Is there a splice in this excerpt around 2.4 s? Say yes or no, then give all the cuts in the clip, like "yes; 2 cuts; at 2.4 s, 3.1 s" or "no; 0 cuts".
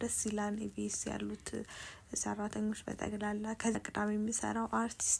no; 1 cut; at 3.8 s